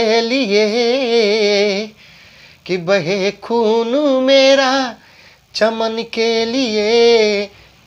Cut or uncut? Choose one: uncut